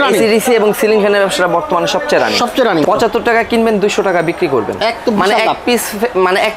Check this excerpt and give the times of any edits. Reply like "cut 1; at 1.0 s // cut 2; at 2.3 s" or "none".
cut 1; at 2.8 s